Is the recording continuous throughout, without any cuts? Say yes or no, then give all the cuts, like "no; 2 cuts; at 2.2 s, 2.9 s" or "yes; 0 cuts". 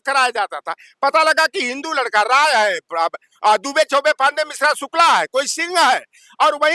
yes; 0 cuts